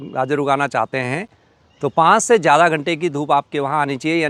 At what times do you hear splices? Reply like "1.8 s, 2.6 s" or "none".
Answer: none